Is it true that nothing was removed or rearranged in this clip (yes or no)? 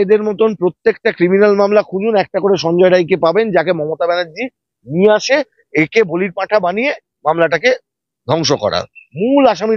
yes